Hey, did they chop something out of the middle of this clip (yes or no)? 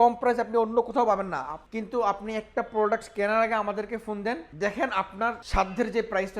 yes